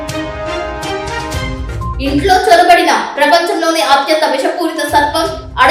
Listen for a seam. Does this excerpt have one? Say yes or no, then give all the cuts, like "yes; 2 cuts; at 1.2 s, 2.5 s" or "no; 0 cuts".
no; 0 cuts